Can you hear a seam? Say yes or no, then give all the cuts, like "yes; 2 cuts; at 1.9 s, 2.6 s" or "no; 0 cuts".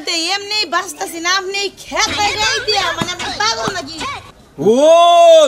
yes; 1 cut; at 4.2 s